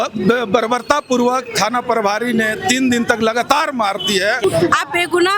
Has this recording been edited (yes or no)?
yes